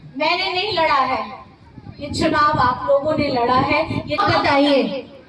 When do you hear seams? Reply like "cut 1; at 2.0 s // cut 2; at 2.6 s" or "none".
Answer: cut 1; at 4.2 s